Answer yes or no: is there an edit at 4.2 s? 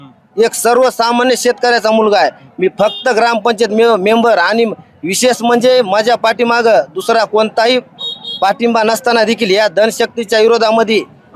no